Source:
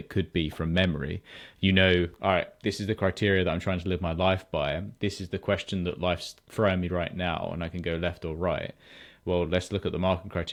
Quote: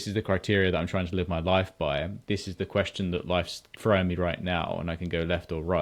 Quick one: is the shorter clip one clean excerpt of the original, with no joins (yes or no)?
yes